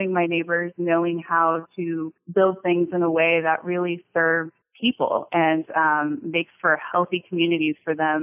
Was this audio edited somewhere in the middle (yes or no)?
yes